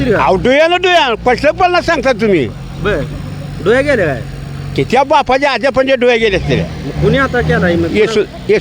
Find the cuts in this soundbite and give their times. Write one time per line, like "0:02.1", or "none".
none